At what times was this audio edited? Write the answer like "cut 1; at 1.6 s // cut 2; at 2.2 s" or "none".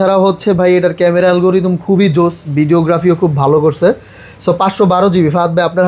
none

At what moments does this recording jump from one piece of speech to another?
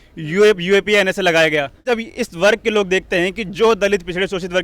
cut 1; at 1.9 s

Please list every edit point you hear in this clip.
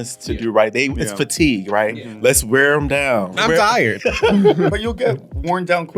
cut 1; at 3.5 s // cut 2; at 4.7 s

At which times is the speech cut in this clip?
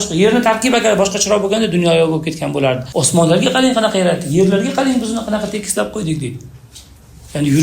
cut 1; at 2.8 s

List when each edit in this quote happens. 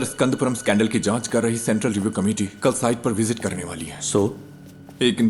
none

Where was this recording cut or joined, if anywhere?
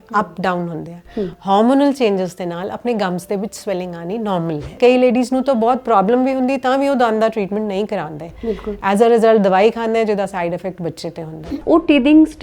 cut 1; at 4.7 s // cut 2; at 11.6 s

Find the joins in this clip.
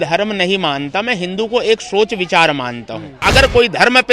cut 1; at 3.2 s

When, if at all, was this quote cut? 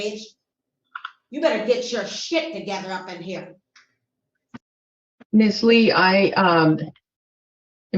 cut 1; at 4.6 s

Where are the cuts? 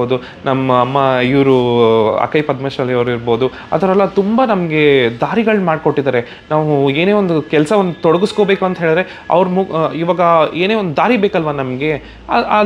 none

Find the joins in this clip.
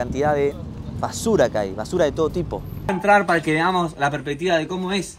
cut 1; at 3.0 s

